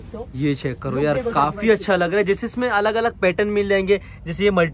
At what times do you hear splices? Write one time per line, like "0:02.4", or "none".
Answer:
none